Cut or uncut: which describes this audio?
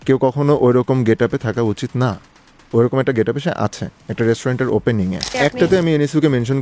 cut